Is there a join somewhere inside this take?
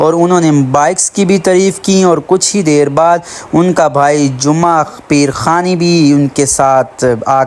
no; 0 cuts

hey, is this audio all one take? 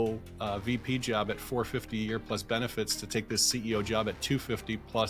yes; 0 cuts

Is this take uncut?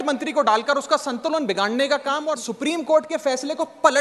no; 1 cut; at 2.5 s

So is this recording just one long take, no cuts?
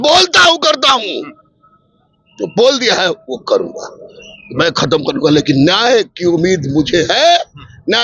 yes; 0 cuts

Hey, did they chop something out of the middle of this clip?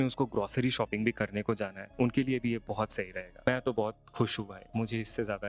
yes; 2 cuts; at 1.8 s, 3.4 s

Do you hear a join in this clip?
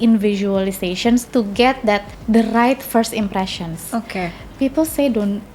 yes; 2 cuts; at 1.3 s, 2.1 s

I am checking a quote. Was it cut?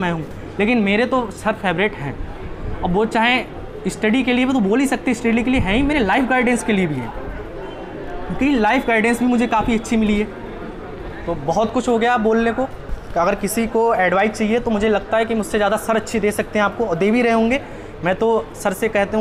no; 0 cuts

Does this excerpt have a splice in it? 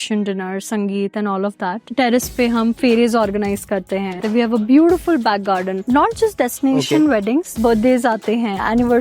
yes; 3 cuts; at 4.1 s, 5.8 s, 7.5 s

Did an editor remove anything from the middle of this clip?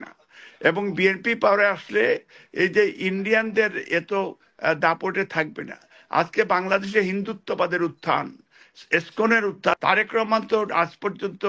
yes; 1 cut; at 9.7 s

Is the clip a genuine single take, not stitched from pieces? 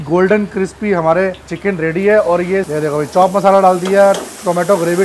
no; 2 cuts; at 1.5 s, 2.7 s

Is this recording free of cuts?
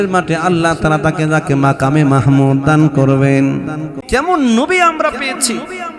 no; 1 cut; at 3.9 s

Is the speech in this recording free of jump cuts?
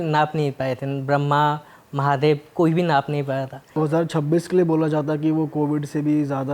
no; 1 cut; at 3.9 s

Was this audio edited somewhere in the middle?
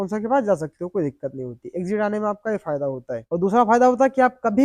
no; 0 cuts

